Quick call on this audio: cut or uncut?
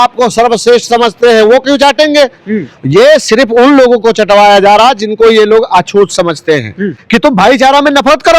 cut